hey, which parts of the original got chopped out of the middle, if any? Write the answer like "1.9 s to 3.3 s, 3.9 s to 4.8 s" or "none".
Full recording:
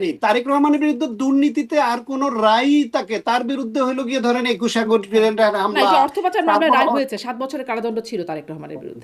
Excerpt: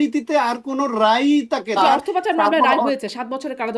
3.2 s to 5.9 s